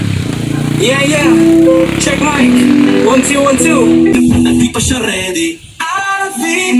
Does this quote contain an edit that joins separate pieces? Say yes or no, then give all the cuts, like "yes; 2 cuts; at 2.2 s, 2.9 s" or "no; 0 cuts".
yes; 1 cut; at 4.1 s